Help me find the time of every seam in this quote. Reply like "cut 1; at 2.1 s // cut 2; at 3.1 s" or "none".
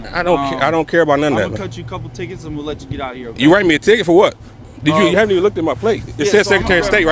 none